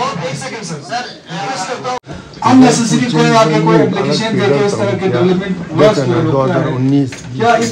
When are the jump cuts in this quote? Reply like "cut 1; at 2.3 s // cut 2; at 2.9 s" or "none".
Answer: cut 1; at 2.1 s